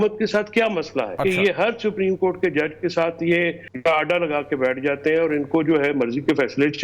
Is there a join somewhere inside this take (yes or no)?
yes